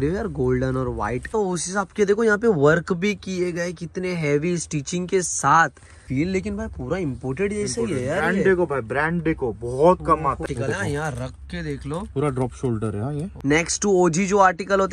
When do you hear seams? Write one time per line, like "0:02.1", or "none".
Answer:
0:01.3
0:06.0
0:10.4
0:13.3